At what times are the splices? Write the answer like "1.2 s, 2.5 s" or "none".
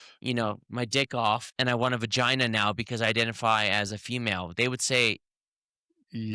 1.5 s